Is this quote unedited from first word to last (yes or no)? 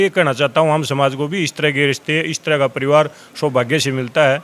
yes